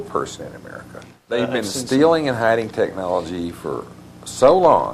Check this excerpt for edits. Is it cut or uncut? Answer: cut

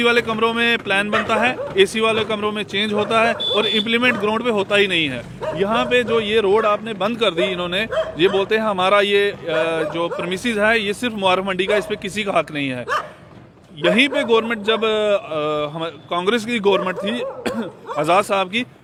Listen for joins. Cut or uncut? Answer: uncut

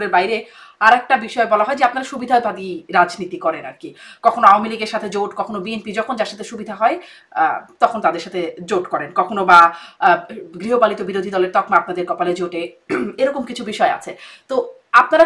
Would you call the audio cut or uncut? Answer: uncut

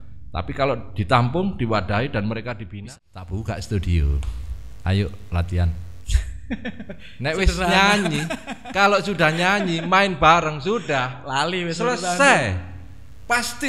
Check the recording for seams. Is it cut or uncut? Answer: cut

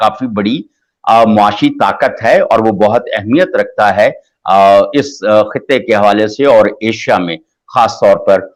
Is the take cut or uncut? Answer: uncut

